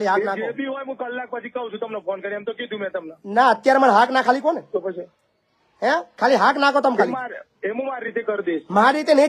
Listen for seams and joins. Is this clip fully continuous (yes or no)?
yes